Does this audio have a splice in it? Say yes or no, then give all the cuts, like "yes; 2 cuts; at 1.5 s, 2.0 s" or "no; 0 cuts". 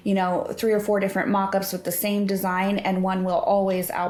no; 0 cuts